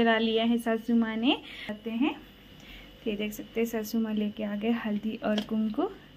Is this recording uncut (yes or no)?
no